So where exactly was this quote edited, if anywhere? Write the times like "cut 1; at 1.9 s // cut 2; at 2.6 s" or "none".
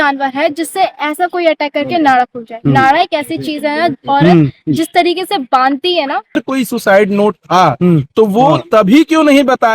cut 1; at 6.4 s